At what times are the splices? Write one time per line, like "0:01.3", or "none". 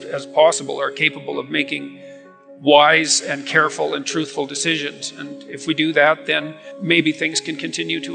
0:06.7